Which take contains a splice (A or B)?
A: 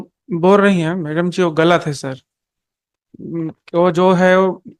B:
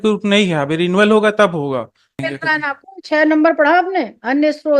B